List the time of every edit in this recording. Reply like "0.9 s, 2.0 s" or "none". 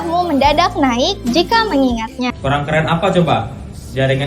2.3 s